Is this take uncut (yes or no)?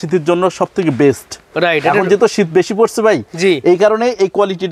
yes